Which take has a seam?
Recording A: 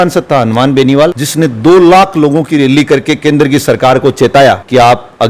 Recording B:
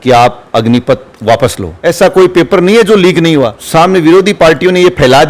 B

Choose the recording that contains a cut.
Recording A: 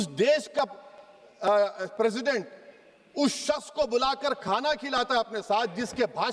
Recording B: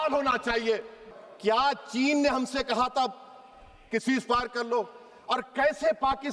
B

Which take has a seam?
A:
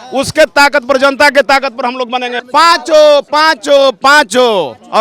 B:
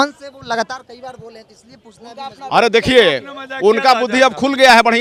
A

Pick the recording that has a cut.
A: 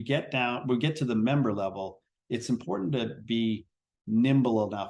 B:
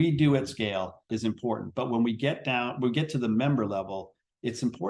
B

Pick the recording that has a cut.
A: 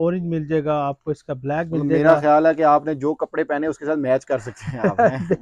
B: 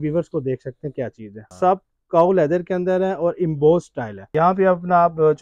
B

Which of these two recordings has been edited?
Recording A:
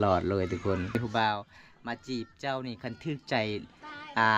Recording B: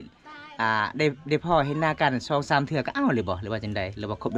A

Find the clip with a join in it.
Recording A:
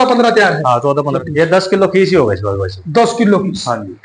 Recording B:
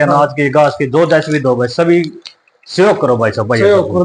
A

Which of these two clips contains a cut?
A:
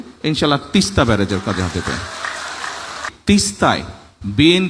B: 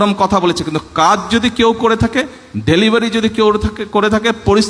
A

